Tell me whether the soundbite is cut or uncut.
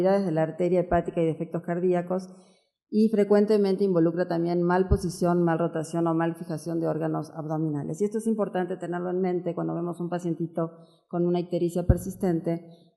cut